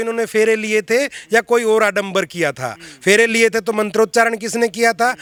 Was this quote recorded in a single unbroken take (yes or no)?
yes